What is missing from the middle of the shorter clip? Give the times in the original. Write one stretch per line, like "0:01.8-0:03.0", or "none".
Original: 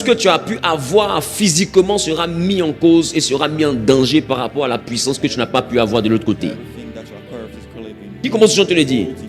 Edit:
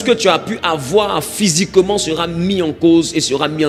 none

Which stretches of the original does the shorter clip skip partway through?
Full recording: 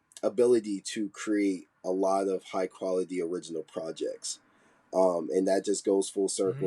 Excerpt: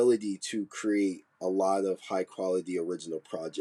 none

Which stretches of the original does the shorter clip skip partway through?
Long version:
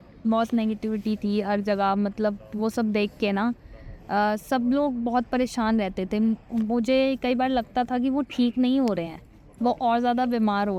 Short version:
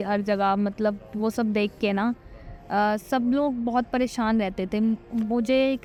none

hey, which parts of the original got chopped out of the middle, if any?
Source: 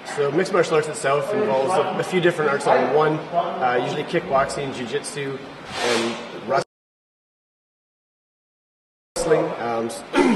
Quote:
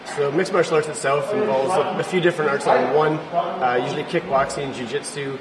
none

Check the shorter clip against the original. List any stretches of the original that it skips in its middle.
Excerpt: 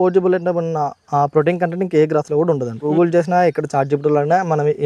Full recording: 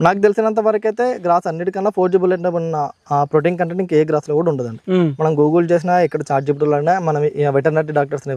0:04.8-0:05.4

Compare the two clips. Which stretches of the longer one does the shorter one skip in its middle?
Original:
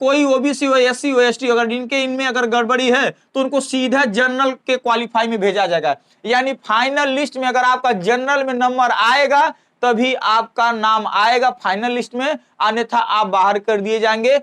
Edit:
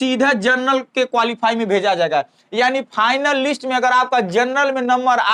none

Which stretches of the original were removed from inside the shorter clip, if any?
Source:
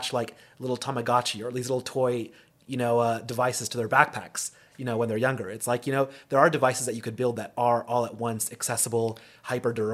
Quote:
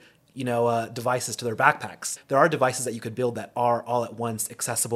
0:04.5-0:06.2

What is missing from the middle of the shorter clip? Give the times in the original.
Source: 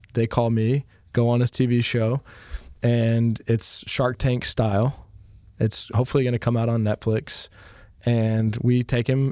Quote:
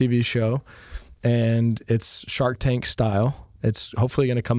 0:05.0-0:05.4

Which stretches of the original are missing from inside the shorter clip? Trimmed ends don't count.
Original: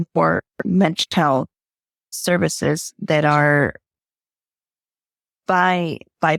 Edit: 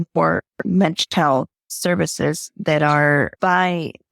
0:01.6-0:02.1
0:03.8-0:05.4

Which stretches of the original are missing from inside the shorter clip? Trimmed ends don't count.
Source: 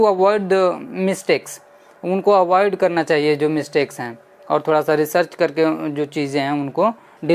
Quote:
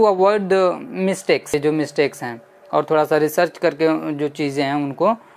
0:01.6-0:03.3

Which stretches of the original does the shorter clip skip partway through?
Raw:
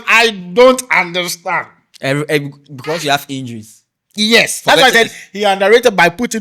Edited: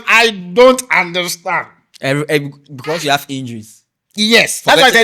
none

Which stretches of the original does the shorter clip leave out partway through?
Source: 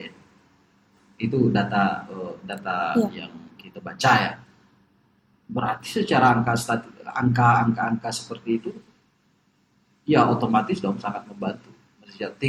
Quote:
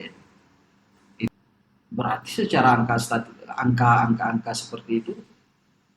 0:01.3-0:04.9

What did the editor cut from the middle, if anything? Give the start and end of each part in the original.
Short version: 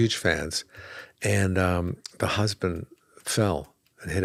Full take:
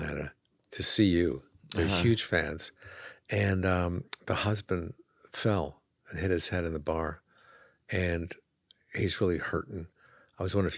none

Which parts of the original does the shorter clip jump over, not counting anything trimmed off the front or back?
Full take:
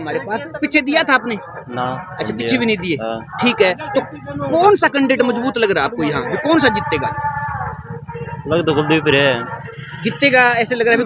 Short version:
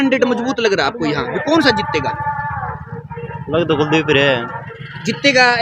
none

